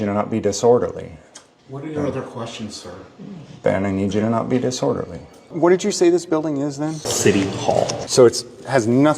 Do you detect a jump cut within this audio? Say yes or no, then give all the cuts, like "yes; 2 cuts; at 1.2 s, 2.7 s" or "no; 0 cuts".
yes; 2 cuts; at 5.5 s, 8.0 s